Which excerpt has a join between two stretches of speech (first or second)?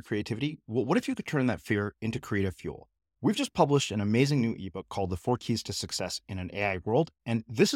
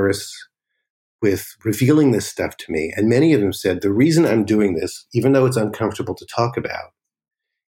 second